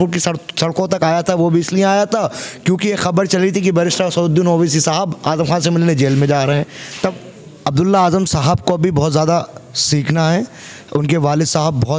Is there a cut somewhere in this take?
yes; 1 cut; at 7.1 s

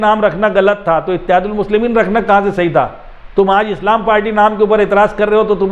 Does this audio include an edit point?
no; 0 cuts

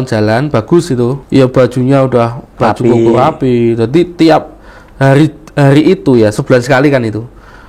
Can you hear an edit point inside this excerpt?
yes; 1 cut; at 1.2 s

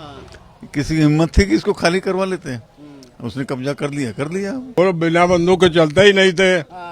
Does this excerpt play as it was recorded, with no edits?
no; 1 cut; at 4.8 s

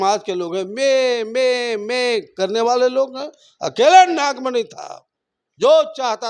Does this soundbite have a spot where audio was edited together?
no; 0 cuts

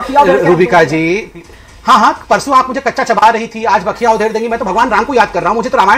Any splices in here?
no; 0 cuts

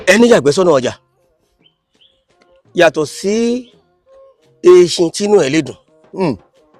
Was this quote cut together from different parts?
no; 0 cuts

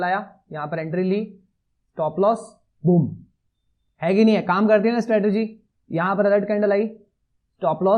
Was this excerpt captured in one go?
yes; 0 cuts

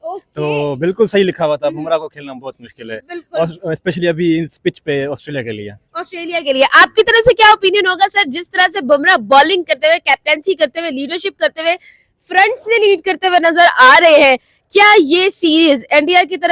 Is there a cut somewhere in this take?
no; 0 cuts

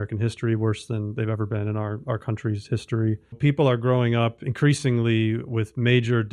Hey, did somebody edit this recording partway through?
yes; 1 cut; at 3.4 s

